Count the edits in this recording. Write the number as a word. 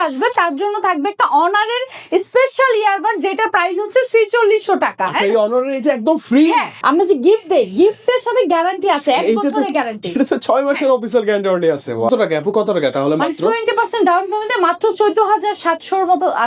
two